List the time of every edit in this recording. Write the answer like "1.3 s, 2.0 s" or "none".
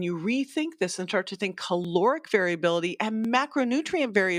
none